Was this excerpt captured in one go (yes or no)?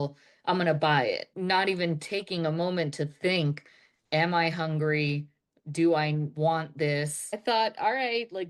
no